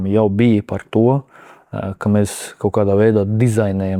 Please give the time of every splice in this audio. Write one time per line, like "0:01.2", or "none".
none